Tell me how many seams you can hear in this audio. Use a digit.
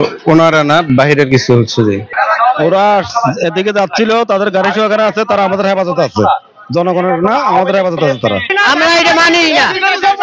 2